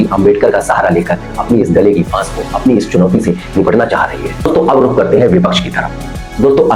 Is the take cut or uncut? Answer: uncut